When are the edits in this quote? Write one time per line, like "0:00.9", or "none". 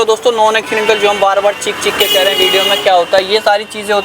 none